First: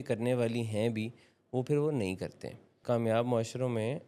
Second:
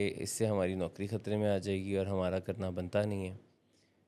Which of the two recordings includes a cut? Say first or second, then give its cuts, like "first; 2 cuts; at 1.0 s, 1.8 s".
first; 1 cut; at 2.8 s